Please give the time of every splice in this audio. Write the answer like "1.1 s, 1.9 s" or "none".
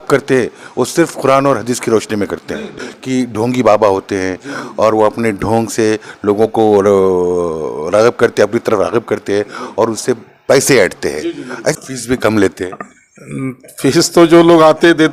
2.8 s, 11.7 s